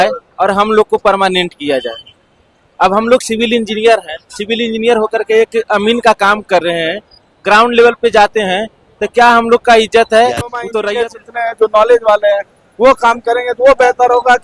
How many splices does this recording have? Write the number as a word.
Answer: one